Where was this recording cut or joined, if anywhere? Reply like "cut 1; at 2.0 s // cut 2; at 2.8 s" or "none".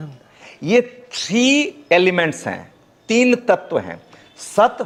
none

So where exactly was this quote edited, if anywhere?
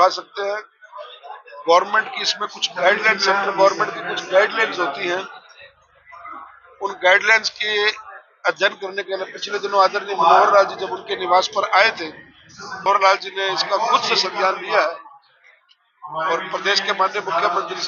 cut 1; at 12.8 s

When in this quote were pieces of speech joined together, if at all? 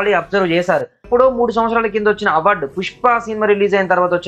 cut 1; at 1.1 s

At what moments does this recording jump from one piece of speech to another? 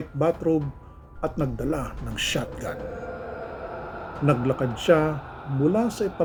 none

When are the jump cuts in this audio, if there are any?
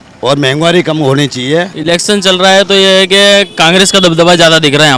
cut 1; at 1.7 s

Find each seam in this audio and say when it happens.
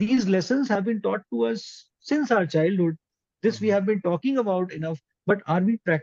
none

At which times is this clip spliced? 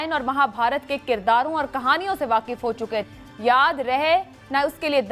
cut 1; at 3.2 s

